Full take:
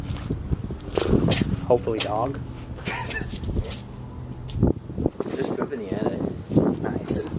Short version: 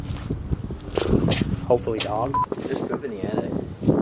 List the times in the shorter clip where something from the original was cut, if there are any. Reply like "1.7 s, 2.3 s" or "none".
2.4 s